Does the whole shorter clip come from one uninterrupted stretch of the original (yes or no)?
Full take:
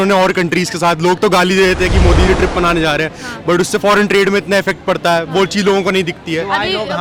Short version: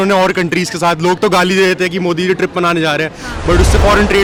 yes